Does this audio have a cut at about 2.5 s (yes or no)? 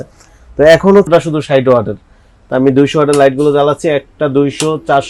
no